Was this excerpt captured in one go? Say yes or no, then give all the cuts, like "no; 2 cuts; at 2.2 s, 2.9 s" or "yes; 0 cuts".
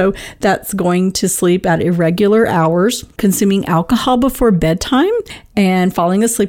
no; 2 cuts; at 3.1 s, 5.4 s